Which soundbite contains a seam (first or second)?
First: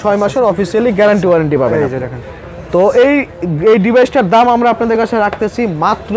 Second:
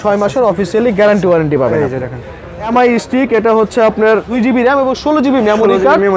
second